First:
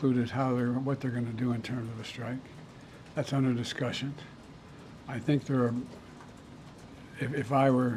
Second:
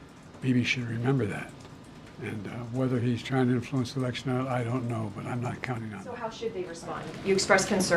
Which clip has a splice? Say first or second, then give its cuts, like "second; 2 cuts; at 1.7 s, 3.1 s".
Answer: second; 1 cut; at 6.0 s